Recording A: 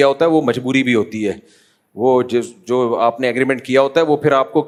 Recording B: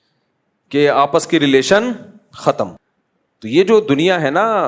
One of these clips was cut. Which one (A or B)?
B